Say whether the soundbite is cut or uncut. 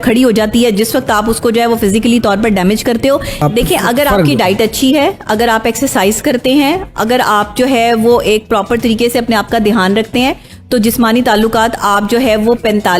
cut